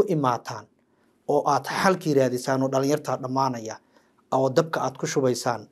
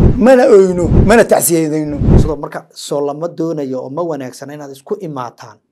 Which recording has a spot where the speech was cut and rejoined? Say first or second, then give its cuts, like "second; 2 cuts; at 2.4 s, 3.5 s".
second; 2 cuts; at 0.9 s, 2.1 s